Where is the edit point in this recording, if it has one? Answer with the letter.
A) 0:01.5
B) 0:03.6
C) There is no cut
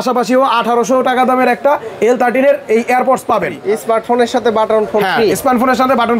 B